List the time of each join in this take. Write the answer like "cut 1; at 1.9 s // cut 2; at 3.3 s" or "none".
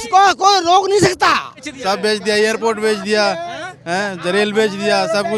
cut 1; at 1.7 s